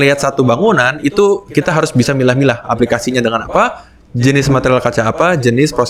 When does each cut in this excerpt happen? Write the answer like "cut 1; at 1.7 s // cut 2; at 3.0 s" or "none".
none